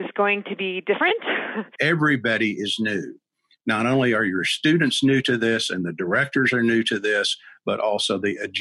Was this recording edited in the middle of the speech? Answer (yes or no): yes